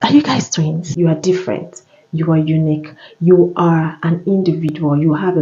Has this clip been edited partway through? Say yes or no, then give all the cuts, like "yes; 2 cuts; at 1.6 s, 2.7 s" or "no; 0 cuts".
yes; 1 cut; at 1.3 s